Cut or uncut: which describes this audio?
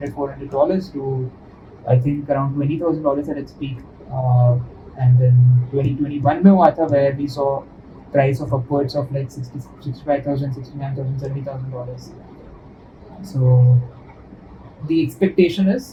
uncut